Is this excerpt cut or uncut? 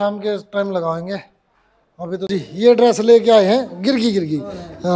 cut